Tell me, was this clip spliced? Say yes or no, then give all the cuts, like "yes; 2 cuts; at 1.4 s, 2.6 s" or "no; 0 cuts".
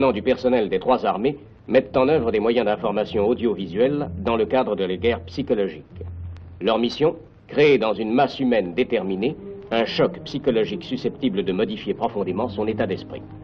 no; 0 cuts